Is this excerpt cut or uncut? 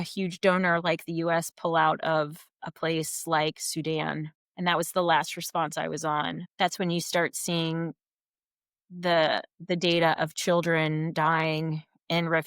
cut